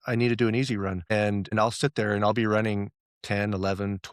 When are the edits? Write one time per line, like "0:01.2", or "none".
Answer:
0:01.5